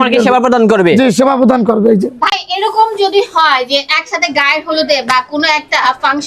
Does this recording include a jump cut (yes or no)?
no